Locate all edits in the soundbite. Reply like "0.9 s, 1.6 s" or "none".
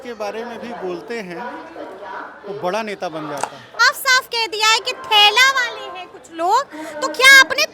3.8 s